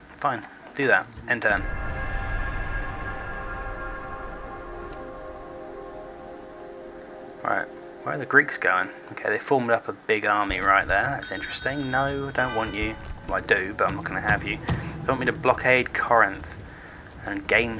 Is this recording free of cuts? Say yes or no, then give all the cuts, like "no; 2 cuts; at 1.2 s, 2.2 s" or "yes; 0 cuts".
yes; 0 cuts